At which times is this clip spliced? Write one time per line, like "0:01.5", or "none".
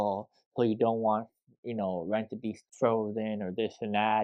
0:02.6